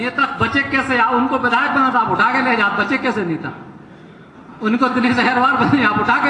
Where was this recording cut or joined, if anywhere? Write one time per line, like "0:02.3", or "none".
none